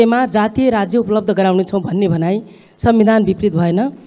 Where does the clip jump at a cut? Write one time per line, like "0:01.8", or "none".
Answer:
none